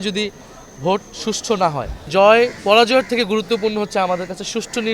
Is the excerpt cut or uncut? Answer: cut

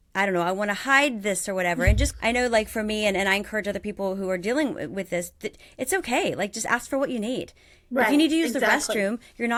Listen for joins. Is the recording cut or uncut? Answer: uncut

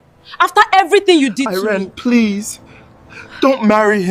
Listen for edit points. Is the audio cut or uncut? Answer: cut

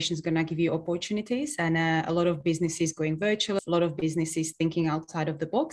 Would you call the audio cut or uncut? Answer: cut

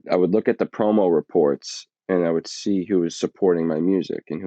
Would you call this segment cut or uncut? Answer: uncut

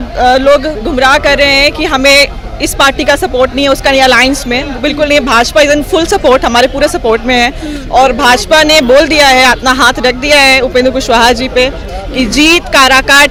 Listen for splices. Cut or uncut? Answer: uncut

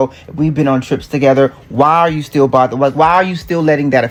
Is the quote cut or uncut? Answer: uncut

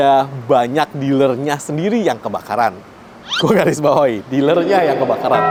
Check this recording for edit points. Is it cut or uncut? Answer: uncut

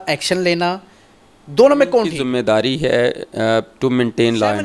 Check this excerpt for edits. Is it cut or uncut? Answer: cut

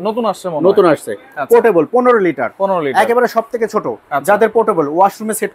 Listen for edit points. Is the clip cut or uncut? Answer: uncut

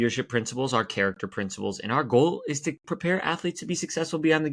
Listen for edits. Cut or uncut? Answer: uncut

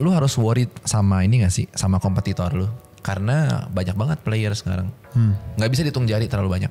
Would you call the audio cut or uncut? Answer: uncut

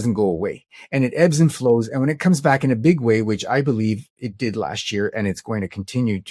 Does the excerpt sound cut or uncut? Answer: uncut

